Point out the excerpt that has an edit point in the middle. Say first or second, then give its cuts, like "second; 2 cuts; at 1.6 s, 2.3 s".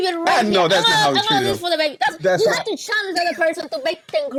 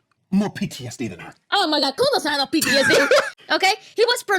second; 1 cut; at 3.3 s